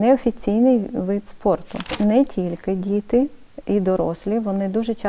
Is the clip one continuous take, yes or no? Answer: no